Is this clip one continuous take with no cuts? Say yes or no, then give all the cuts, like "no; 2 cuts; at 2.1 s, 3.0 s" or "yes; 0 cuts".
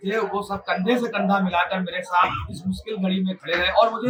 yes; 0 cuts